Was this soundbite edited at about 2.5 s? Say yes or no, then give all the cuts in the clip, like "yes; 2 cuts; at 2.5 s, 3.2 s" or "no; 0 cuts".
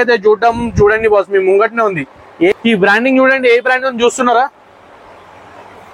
yes; 1 cut; at 2.5 s